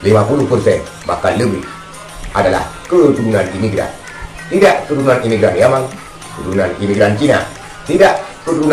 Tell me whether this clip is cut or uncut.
uncut